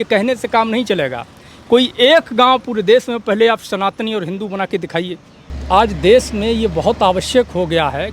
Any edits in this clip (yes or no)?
yes